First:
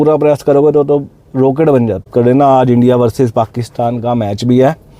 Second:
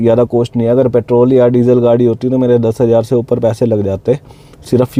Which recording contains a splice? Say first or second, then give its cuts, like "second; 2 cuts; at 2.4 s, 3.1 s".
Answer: first; 1 cut; at 2.1 s